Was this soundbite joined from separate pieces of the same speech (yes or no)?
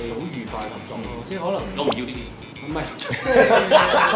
no